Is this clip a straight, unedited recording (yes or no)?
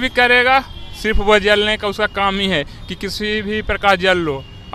yes